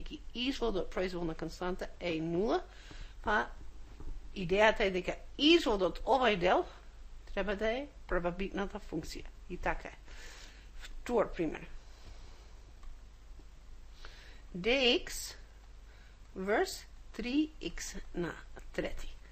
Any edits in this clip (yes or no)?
no